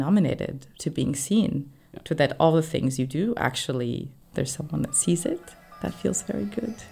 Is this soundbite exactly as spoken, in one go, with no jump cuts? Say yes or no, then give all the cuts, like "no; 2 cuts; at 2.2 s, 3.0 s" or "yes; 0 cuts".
yes; 0 cuts